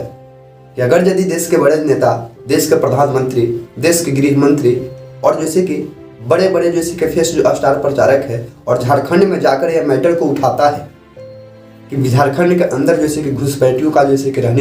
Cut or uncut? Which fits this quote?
uncut